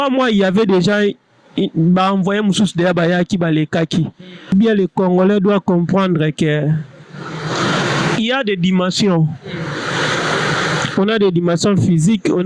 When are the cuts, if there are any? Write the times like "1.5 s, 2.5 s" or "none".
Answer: 4.5 s